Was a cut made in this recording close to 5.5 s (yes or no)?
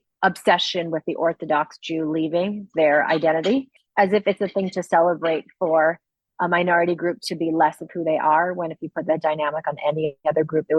no